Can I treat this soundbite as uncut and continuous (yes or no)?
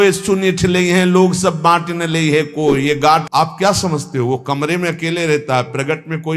no